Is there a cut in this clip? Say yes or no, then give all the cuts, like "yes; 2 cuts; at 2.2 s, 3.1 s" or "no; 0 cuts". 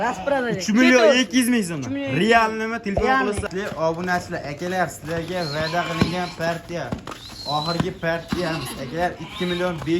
yes; 1 cut; at 3.5 s